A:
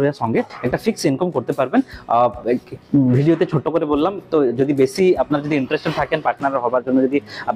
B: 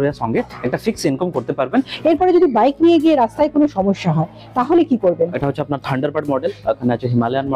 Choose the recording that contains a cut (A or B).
B